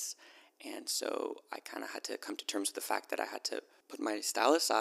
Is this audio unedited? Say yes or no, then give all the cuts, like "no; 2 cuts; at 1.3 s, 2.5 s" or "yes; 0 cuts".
no; 1 cut; at 3.8 s